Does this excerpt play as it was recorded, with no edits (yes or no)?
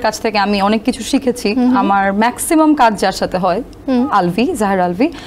yes